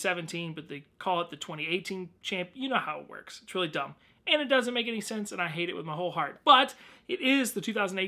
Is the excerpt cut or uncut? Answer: uncut